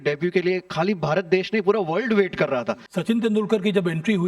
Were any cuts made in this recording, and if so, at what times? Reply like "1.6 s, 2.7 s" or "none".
2.8 s